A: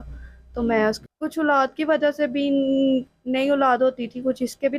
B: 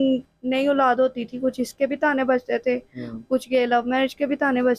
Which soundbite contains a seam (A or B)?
A